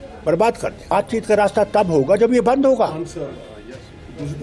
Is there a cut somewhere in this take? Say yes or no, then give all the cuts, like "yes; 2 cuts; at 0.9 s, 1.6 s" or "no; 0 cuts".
yes; 1 cut; at 0.9 s